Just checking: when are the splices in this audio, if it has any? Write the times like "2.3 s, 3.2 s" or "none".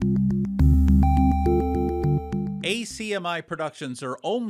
2.5 s